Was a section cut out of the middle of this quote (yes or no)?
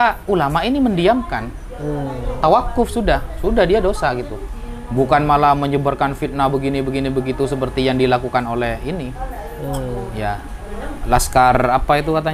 no